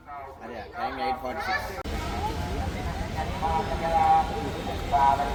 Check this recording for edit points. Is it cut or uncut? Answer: uncut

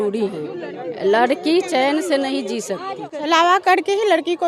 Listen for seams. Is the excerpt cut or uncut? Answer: cut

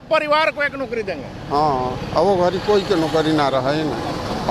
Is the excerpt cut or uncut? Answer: uncut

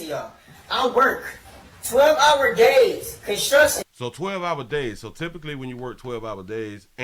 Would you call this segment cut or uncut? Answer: uncut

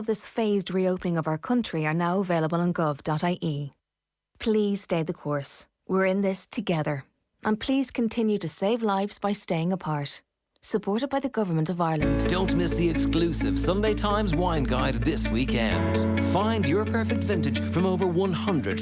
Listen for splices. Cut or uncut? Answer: cut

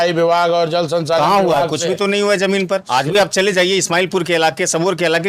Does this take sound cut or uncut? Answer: cut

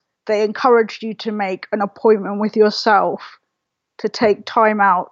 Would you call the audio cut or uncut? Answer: uncut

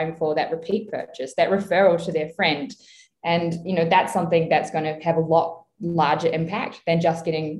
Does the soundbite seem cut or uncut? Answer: uncut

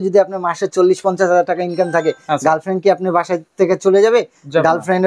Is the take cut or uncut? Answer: uncut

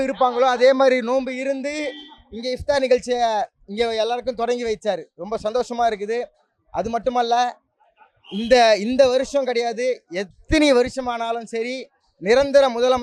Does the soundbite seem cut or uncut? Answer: uncut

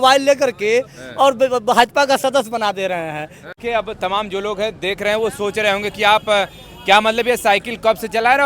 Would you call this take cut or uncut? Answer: cut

